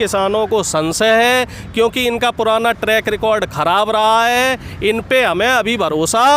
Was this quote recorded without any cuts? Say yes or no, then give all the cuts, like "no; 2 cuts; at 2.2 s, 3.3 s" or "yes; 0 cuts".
yes; 0 cuts